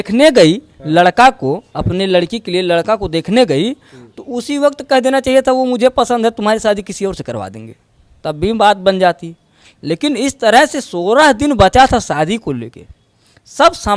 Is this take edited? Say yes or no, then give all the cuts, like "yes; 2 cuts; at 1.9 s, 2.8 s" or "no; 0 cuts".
no; 0 cuts